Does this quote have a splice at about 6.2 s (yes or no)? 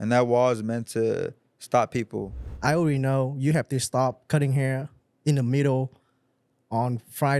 no